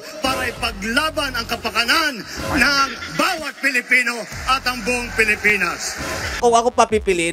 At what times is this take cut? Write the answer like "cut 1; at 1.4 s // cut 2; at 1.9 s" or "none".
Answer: cut 1; at 6.3 s